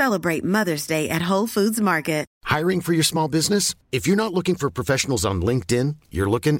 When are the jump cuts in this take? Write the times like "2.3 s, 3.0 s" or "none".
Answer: 2.3 s